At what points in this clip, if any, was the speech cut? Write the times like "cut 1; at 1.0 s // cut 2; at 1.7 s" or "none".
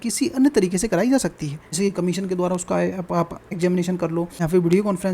cut 1; at 1.6 s // cut 2; at 3.4 s // cut 3; at 4.3 s